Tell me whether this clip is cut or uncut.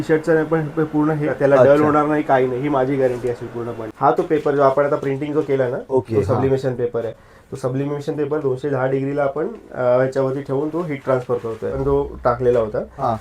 cut